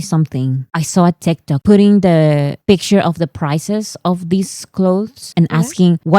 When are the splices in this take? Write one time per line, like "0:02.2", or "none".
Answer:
none